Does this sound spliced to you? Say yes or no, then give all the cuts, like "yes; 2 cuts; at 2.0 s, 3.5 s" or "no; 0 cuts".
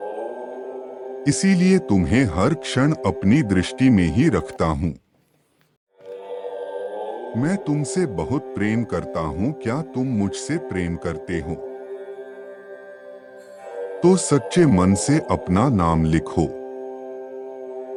no; 0 cuts